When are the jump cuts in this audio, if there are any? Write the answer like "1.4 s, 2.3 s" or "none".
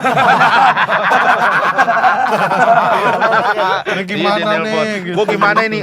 3.0 s, 4.0 s